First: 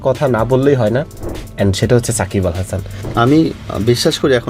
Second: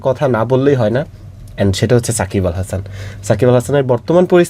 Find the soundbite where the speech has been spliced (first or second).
first